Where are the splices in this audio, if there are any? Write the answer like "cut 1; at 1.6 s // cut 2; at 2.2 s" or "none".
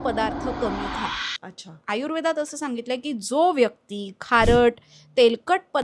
none